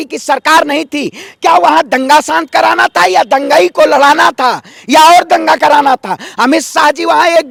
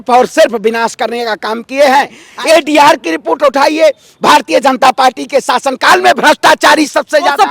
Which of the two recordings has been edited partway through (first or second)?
second